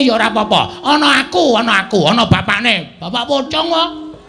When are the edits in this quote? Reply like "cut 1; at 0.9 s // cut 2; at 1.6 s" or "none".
none